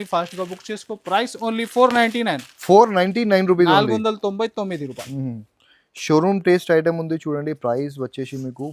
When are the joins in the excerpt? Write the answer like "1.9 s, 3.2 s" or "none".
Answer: none